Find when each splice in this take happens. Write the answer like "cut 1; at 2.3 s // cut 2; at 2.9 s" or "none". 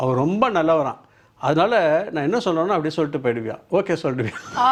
none